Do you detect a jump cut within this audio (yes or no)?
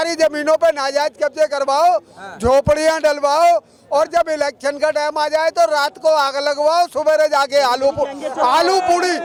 no